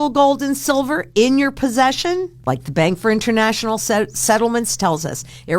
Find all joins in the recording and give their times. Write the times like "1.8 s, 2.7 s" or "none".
2.3 s